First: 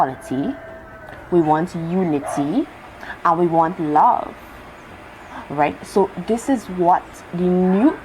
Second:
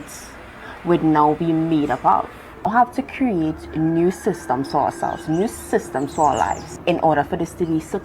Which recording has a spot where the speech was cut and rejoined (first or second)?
second